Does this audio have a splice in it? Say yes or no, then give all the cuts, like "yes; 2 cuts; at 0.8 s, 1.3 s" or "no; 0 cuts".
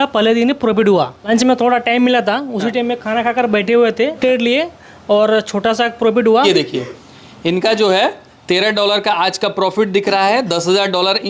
yes; 3 cuts; at 1.2 s, 4.2 s, 6.4 s